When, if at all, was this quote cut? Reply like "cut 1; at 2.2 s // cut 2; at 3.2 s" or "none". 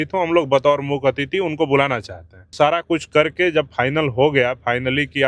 cut 1; at 2.5 s